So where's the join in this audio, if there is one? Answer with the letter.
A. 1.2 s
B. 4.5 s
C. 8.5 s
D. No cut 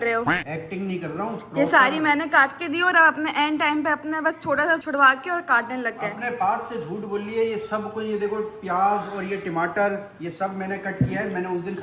D